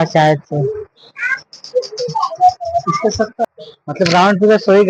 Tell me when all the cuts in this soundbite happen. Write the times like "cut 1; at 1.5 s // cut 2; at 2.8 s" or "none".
cut 1; at 3.7 s